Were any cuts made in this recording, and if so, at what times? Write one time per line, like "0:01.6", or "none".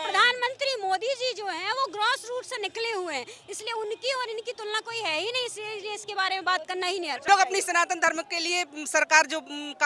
0:07.2